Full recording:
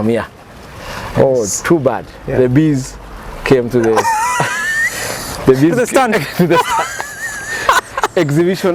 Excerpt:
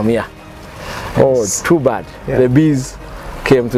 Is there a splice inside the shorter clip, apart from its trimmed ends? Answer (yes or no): no